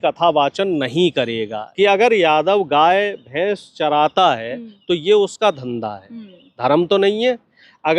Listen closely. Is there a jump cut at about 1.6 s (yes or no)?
yes